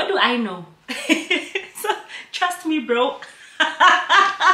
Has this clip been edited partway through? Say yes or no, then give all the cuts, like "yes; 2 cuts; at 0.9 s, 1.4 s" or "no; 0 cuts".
no; 0 cuts